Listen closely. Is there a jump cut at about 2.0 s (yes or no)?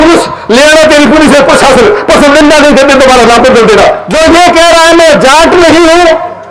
no